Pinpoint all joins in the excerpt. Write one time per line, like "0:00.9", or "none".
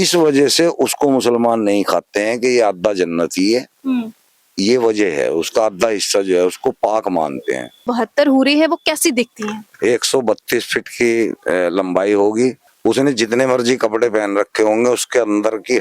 0:07.9
0:12.6